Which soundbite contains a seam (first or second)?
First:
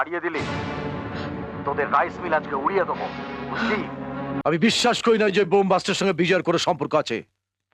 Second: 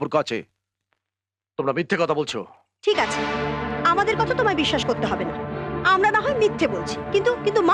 first